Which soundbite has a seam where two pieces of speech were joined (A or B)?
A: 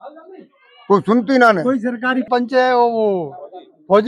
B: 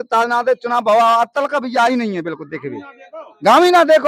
A